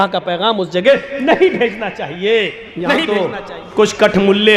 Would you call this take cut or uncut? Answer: cut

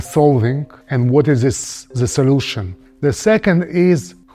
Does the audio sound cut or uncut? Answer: cut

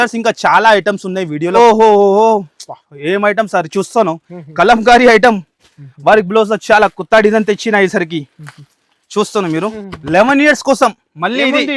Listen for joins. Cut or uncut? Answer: cut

